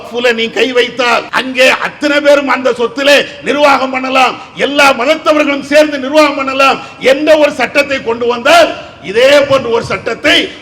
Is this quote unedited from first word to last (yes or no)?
no